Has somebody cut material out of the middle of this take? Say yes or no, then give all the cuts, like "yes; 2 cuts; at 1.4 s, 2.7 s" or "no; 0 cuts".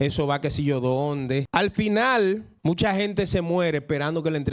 yes; 2 cuts; at 1.5 s, 2.5 s